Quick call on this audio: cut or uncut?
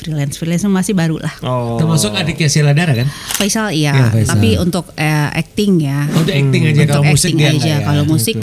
cut